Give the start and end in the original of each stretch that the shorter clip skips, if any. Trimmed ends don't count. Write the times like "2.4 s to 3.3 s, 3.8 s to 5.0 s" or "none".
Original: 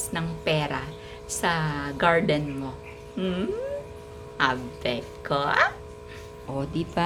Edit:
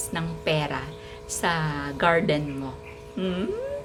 none